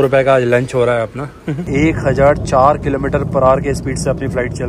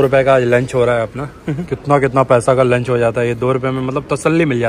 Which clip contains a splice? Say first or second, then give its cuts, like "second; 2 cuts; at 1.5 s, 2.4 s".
first; 1 cut; at 1.5 s